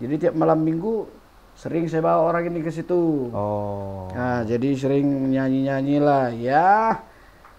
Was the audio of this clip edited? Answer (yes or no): no